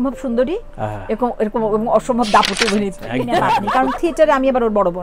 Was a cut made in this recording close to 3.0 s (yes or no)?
yes